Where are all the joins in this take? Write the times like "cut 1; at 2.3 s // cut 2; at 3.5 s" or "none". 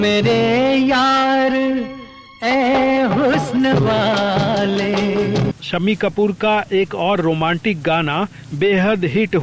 cut 1; at 5.6 s